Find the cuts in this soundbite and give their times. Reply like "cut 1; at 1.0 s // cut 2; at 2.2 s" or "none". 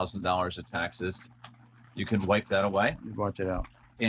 none